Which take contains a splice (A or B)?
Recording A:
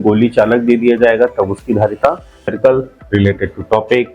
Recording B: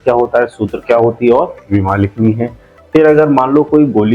A